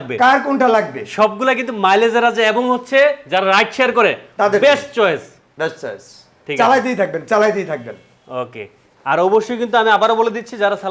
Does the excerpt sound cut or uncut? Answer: uncut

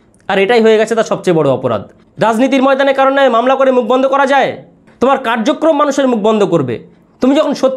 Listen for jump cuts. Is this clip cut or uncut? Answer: cut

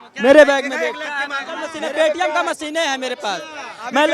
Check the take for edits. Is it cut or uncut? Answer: cut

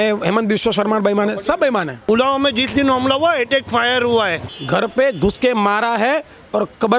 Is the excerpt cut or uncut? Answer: cut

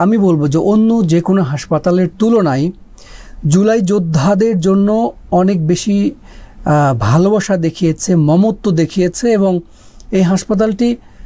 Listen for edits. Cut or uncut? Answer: uncut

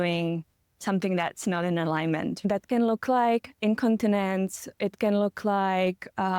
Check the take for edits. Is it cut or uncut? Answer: cut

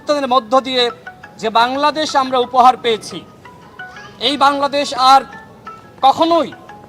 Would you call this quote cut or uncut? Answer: uncut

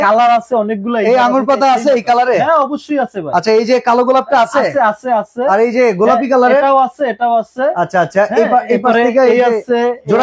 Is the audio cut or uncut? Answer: uncut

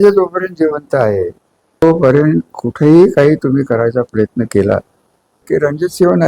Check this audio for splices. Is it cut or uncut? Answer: cut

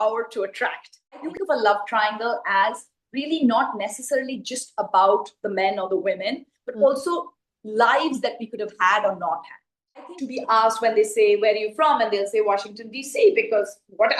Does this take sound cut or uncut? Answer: cut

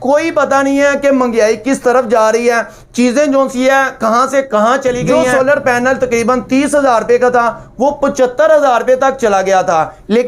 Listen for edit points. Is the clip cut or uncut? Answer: cut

